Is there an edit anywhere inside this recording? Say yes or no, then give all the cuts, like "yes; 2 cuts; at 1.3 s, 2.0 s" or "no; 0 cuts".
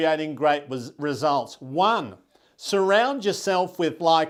no; 0 cuts